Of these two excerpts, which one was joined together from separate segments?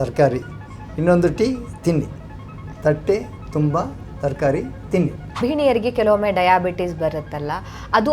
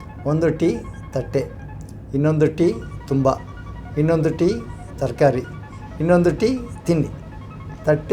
first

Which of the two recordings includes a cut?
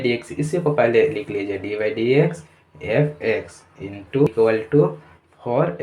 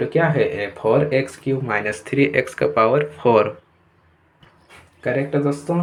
first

